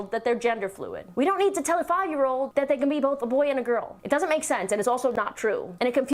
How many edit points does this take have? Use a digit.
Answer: 1